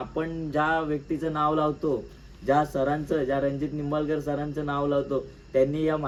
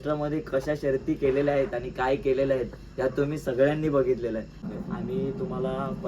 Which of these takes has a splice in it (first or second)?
second